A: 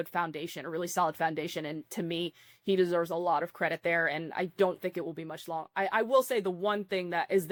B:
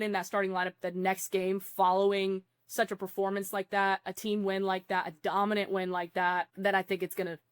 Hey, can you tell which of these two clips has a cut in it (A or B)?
B